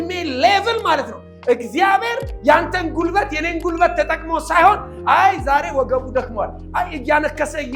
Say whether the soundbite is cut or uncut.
uncut